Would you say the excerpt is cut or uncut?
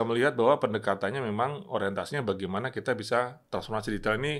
uncut